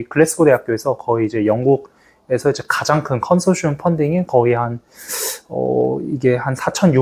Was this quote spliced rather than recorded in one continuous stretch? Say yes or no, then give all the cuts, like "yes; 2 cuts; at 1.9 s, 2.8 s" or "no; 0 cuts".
no; 0 cuts